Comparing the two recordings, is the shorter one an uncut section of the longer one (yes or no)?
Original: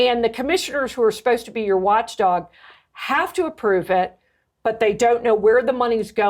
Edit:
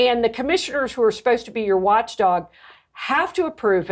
yes